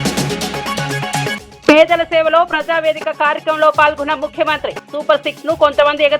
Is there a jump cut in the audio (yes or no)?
yes